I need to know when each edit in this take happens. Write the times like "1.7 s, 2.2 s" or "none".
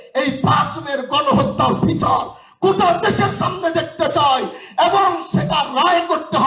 none